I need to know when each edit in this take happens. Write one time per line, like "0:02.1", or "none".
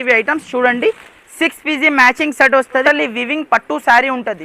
0:02.8